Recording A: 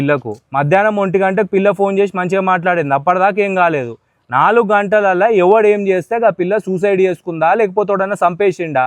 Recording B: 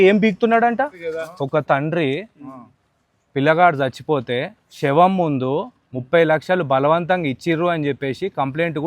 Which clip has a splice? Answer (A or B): B